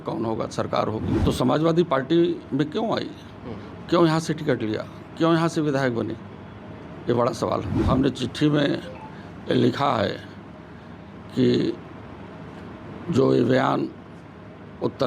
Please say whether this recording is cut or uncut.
cut